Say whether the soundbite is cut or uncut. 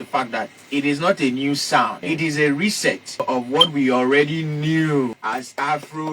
cut